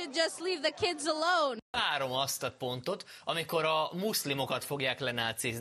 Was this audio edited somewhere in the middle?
yes; 1 cut; at 1.7 s

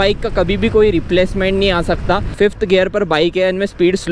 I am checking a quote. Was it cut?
yes; 1 cut; at 2.3 s

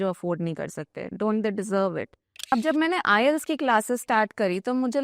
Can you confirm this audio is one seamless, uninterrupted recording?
no; 1 cut; at 2.5 s

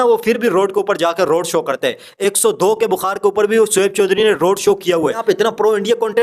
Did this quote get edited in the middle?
yes; 1 cut; at 5.2 s

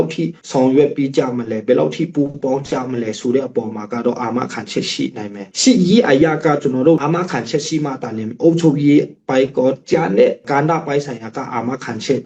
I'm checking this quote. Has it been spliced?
yes; 1 cut; at 7.0 s

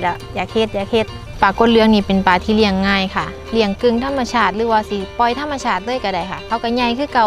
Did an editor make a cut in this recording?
yes; 1 cut; at 1.2 s

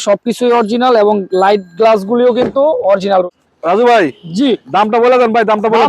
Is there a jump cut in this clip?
yes; 1 cut; at 3.3 s

